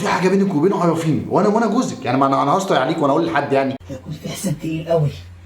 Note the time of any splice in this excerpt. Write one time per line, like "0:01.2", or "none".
0:03.9